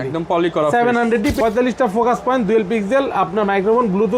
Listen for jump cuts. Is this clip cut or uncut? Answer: cut